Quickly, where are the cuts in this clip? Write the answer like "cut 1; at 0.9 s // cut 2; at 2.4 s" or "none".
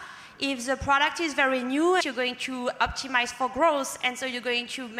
cut 1; at 2.0 s